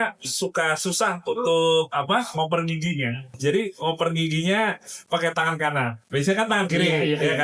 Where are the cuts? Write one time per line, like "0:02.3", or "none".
0:03.3

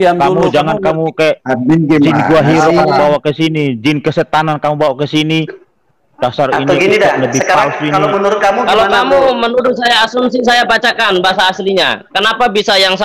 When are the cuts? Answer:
none

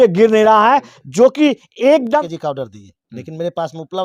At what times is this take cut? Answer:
0:02.2

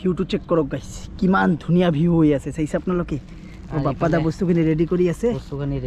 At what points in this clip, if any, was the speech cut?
none

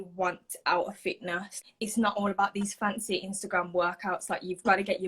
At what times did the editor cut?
0:01.6

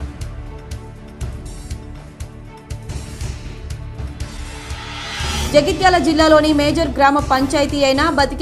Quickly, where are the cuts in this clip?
0:01.1

